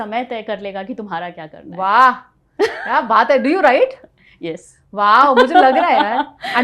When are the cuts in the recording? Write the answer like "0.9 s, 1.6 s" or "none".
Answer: none